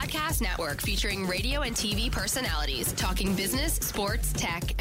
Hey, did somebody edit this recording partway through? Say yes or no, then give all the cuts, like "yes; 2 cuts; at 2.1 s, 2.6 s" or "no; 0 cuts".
no; 0 cuts